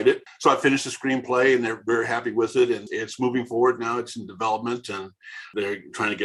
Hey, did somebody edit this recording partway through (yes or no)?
no